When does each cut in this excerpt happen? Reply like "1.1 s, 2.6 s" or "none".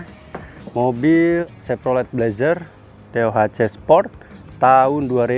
1.6 s